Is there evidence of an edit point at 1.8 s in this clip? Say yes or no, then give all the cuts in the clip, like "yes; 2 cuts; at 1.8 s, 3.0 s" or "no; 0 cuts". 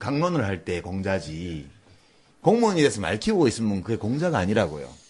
yes; 1 cut; at 1.8 s